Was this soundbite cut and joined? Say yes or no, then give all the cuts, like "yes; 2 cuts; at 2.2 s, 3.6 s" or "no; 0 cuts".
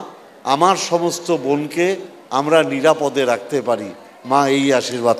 no; 0 cuts